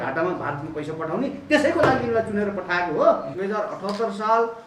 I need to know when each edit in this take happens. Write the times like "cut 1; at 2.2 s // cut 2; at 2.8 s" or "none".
cut 1; at 3.3 s